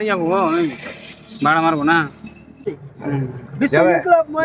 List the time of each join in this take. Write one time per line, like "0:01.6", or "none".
0:02.6